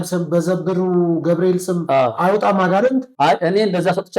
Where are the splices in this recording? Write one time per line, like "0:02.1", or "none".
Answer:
0:03.1